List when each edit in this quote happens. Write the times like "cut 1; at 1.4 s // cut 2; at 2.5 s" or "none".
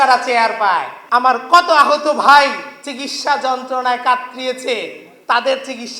cut 1; at 0.9 s